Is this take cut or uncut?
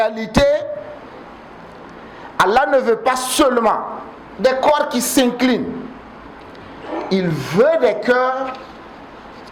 uncut